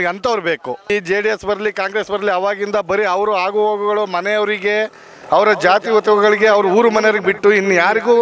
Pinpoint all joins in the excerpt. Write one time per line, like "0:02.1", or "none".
0:00.9